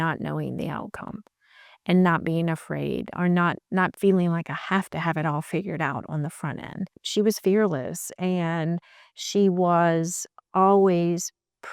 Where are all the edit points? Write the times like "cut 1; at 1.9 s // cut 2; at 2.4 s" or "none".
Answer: cut 1; at 7.0 s